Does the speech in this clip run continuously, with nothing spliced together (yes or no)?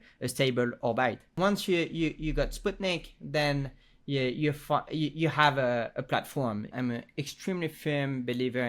no